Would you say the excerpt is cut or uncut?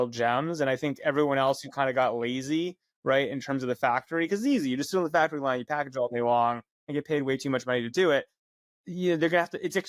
uncut